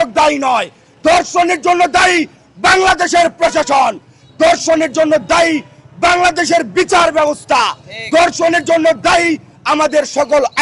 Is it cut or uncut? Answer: uncut